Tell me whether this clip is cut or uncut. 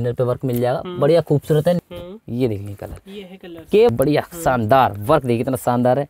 cut